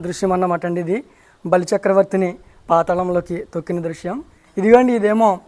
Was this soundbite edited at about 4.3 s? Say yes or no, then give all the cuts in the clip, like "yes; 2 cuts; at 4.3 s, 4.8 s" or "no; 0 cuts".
yes; 1 cut; at 4.3 s